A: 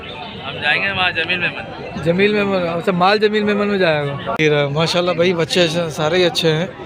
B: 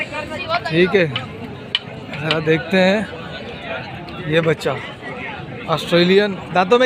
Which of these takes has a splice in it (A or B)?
A